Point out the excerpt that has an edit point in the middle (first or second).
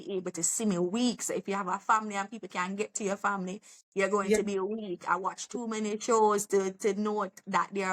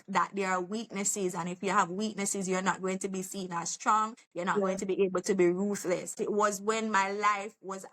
second